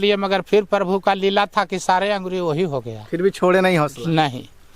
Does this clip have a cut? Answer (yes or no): no